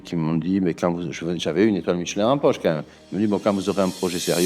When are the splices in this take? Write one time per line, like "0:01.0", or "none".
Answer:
none